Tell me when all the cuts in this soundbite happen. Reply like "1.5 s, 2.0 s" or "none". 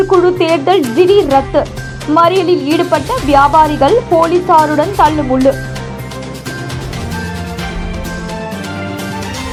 none